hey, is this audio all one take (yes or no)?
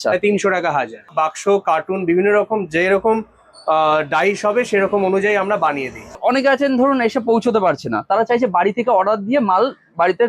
no